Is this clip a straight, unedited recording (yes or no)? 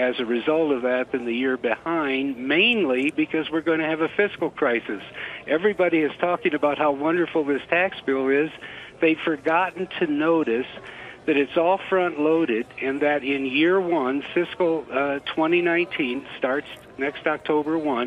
yes